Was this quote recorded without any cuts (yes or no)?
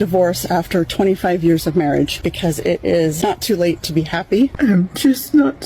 no